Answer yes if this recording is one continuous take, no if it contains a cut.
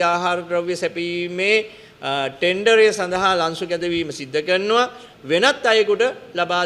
no